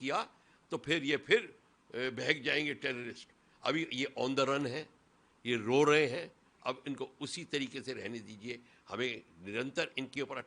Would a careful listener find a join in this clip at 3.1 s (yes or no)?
no